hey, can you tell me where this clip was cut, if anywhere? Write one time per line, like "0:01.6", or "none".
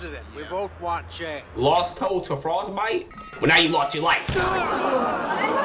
0:01.4